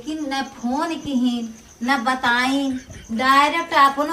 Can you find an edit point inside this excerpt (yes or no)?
no